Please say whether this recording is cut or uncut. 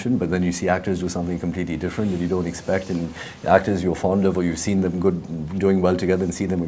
uncut